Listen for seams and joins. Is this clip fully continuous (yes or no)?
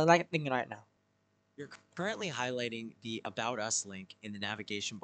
yes